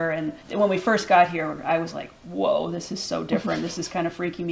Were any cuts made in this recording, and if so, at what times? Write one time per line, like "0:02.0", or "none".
none

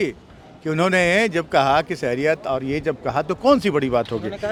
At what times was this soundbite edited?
none

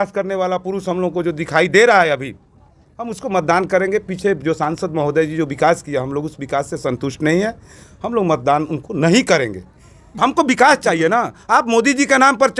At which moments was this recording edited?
0:10.2

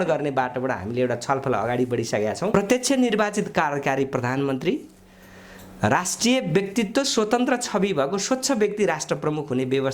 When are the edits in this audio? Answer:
0:02.5

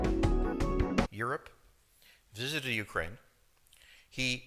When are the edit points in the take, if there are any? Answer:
none

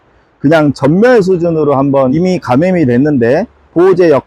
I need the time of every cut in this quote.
0:02.1

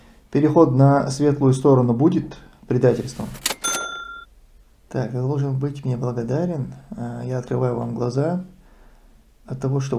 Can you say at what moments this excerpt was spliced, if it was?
0:03.4

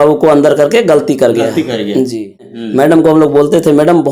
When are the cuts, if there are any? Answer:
0:02.6

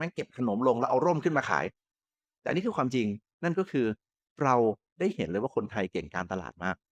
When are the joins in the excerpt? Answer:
none

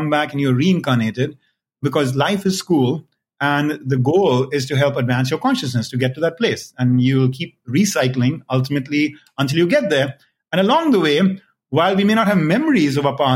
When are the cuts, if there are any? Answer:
0:01.8

